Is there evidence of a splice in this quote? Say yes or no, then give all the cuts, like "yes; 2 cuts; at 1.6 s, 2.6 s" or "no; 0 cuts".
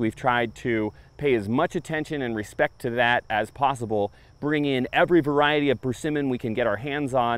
no; 0 cuts